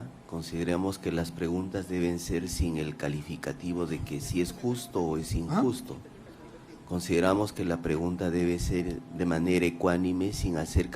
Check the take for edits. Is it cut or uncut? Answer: uncut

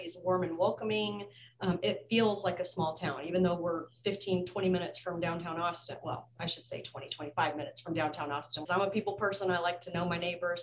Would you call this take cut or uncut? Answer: cut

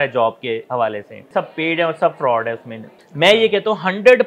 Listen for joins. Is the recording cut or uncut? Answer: cut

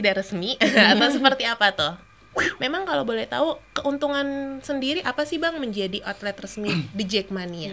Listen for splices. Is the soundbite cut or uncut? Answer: cut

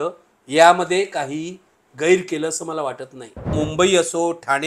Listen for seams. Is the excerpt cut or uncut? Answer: cut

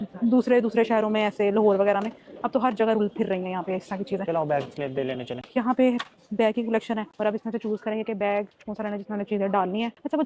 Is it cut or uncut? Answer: uncut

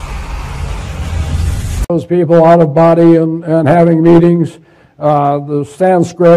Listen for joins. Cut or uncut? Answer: uncut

